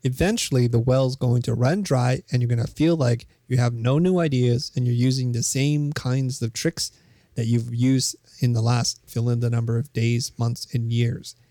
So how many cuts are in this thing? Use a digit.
0